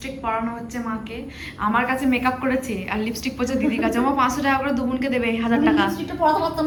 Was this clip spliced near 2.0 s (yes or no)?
no